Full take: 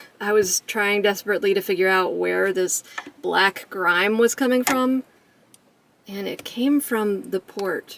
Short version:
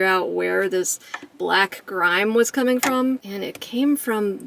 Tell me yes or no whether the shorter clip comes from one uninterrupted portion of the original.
no